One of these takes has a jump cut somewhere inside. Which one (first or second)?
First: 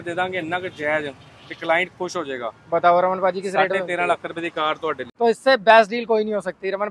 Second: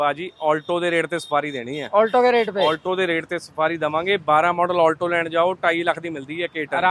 first